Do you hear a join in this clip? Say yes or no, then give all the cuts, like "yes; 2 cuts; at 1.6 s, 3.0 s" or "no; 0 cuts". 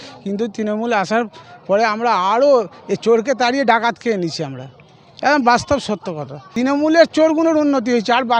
yes; 1 cut; at 6.5 s